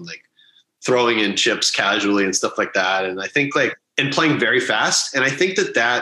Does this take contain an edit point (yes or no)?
yes